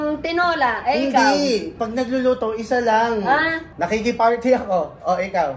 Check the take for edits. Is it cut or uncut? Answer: cut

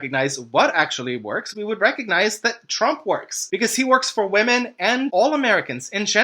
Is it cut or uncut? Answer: cut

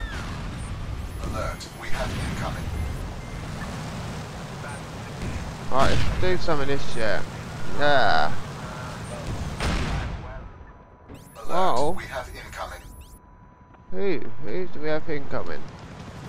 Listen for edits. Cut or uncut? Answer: cut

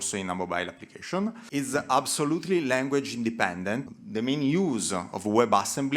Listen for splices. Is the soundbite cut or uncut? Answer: cut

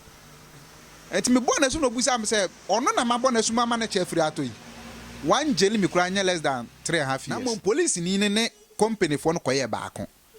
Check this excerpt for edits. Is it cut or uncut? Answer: cut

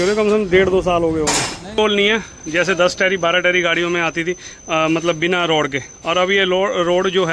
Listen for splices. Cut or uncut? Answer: cut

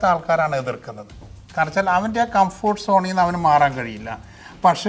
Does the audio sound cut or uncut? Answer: uncut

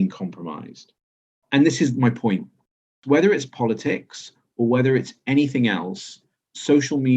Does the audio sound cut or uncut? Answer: cut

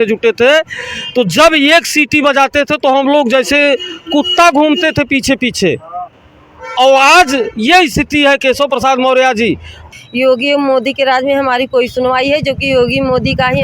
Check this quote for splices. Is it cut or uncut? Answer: cut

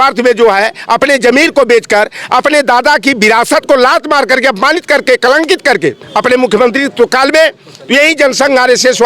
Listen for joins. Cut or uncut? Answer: cut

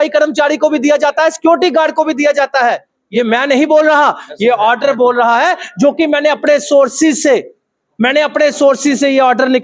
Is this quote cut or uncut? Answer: cut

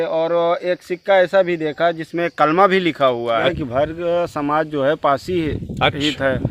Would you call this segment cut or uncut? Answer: cut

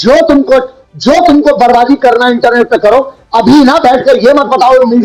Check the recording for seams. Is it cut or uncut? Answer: uncut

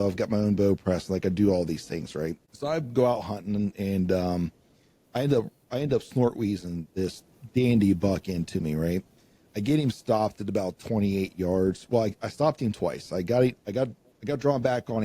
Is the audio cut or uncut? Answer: cut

